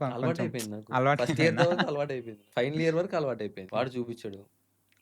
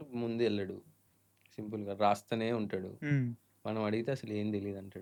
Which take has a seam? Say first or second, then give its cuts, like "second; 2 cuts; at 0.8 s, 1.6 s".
first; 2 cuts; at 2.3 s, 3.6 s